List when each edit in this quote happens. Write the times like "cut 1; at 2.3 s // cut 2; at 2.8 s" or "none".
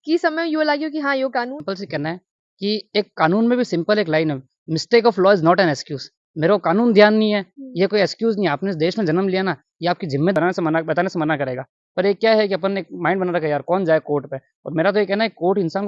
cut 1; at 1.6 s // cut 2; at 10.3 s